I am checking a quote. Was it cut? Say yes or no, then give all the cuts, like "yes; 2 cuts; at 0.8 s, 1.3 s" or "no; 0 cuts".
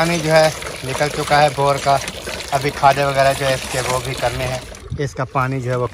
yes; 1 cut; at 4.7 s